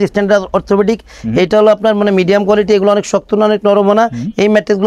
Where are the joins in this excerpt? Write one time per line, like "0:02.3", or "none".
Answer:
none